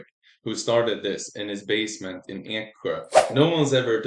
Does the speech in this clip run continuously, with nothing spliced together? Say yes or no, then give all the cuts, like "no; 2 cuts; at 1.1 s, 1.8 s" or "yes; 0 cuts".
no; 1 cut; at 3.1 s